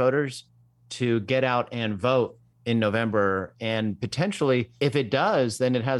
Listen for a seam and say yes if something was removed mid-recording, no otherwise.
yes